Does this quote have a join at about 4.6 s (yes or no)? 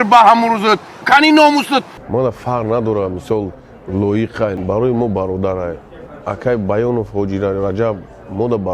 yes